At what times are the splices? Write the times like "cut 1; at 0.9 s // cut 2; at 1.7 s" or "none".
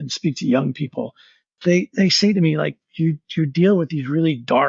none